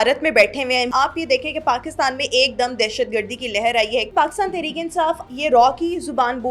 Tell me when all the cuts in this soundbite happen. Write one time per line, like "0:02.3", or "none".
0:00.9
0:04.1
0:05.2

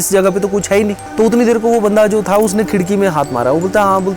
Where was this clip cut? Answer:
0:01.0

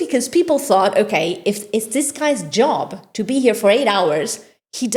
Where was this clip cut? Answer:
none

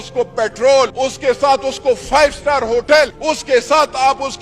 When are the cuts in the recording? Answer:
0:00.9
0:03.2

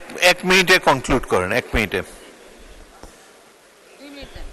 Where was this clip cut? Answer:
none

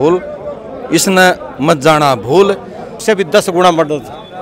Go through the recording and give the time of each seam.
0:03.0

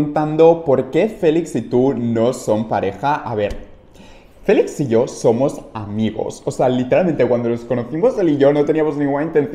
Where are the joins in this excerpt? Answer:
none

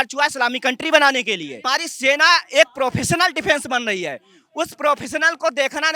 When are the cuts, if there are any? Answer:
0:01.6

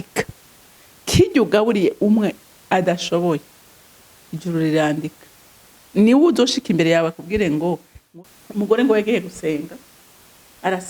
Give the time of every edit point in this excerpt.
0:08.0

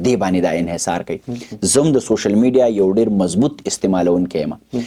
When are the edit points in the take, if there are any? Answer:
none

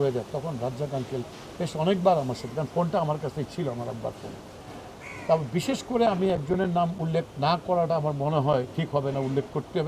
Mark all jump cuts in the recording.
none

